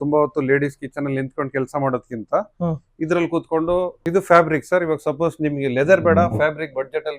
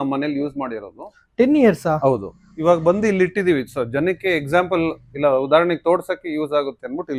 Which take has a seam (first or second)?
first